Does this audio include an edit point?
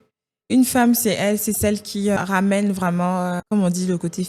yes; 2 cuts; at 2.2 s, 3.4 s

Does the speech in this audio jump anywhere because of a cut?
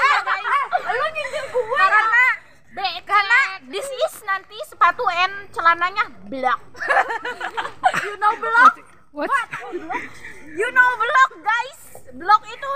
yes; 1 cut; at 10.2 s

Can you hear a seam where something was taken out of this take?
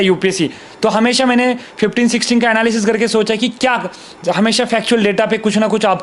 no; 0 cuts

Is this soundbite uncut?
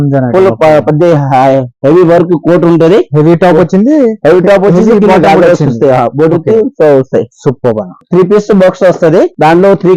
no; 1 cut; at 8.0 s

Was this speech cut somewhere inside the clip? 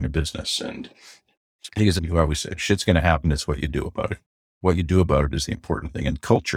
yes; 1 cut; at 2.0 s

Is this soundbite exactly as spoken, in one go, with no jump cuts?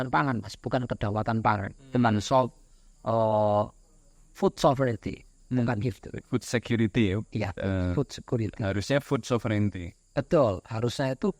yes; 0 cuts

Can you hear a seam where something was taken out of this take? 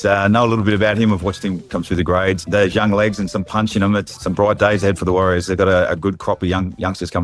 yes; 2 cuts; at 2.4 s, 4.1 s

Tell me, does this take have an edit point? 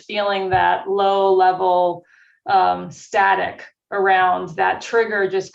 no; 0 cuts

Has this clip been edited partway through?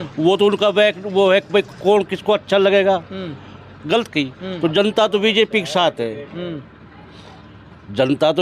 no; 0 cuts

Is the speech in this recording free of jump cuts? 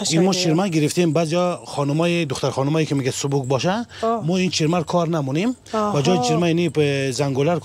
yes; 0 cuts

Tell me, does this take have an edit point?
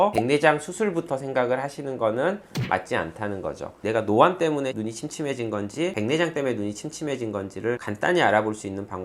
yes; 1 cut; at 3.7 s

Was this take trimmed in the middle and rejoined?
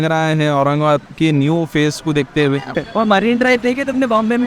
yes; 1 cut; at 2.7 s

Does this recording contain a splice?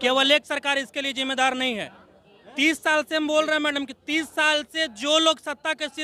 no; 0 cuts

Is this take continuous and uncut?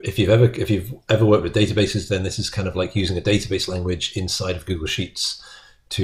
yes; 0 cuts

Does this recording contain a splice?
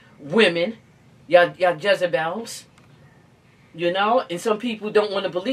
no; 0 cuts

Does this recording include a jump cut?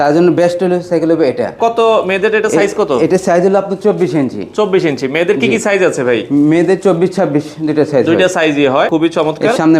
yes; 2 cuts; at 1.5 s, 8.9 s

